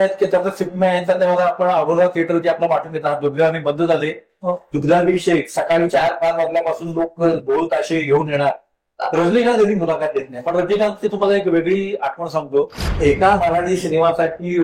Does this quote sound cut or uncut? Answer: cut